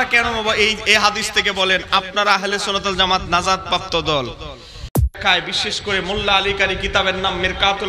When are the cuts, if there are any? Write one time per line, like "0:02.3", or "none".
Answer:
0:05.1